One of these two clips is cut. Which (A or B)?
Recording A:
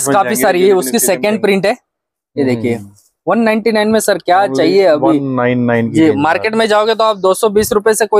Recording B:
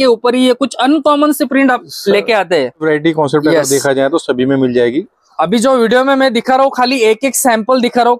B